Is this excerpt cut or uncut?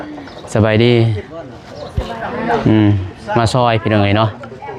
uncut